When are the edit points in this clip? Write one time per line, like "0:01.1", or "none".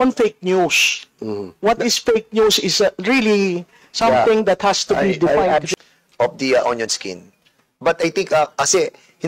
0:05.7